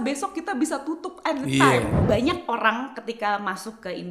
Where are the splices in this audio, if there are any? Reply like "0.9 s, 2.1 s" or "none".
2.0 s